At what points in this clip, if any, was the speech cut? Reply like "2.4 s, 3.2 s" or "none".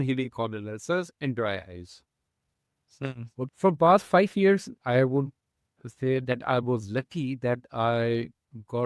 3.5 s